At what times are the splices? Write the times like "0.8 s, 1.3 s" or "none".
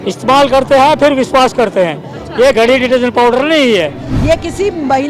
4.1 s

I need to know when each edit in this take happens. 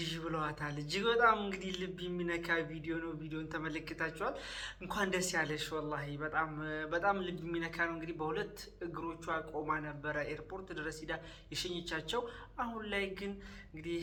none

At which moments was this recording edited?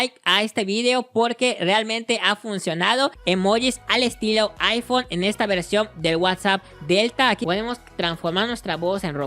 3.2 s, 7.4 s

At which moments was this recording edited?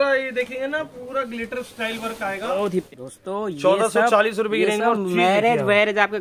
2.9 s

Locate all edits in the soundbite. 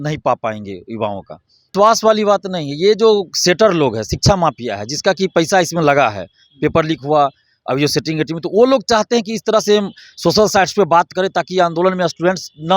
1.7 s

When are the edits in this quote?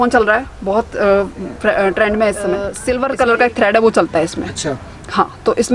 2.7 s

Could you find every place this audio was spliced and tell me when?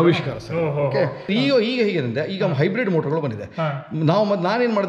1.3 s

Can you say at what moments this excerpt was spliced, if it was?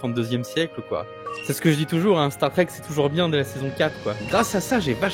1.4 s, 4.2 s

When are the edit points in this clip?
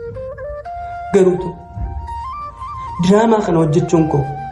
1.1 s

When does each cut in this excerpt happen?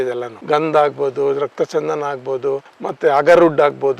2.8 s

